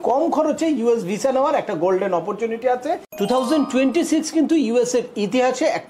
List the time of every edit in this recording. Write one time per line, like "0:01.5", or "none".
0:03.1